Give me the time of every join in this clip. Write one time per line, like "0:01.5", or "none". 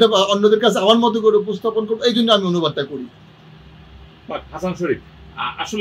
none